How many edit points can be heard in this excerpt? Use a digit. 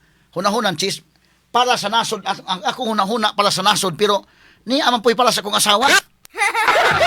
0